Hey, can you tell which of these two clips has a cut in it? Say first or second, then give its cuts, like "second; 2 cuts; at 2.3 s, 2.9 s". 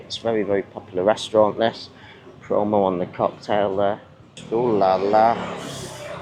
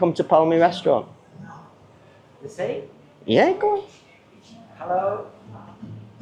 first; 1 cut; at 4.4 s